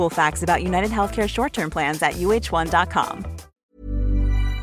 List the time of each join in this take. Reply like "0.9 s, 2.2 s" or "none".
3.5 s